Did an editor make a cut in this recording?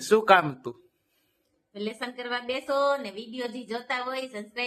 no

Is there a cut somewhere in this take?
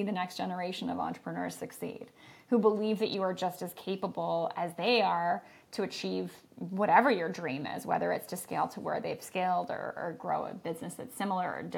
no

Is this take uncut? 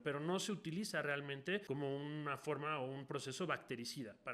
no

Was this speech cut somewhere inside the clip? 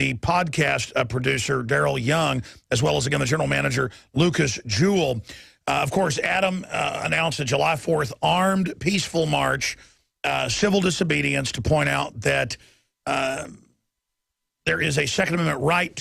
yes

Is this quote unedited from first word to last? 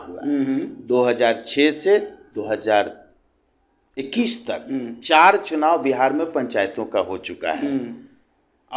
yes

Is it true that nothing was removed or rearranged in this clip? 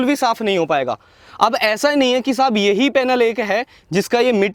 yes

